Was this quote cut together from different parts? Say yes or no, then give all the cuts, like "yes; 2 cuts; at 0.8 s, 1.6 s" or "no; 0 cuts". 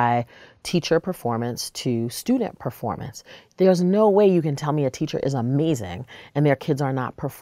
no; 0 cuts